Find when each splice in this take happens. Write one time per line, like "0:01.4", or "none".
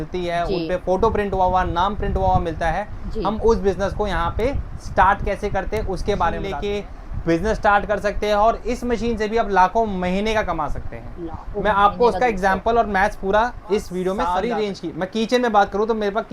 0:06.5
0:14.2